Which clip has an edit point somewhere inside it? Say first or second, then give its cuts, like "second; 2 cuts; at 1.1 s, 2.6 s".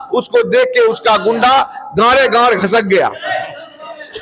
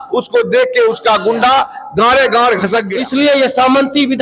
second; 1 cut; at 2.9 s